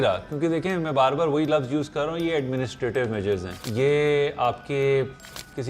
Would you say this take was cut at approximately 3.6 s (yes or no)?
yes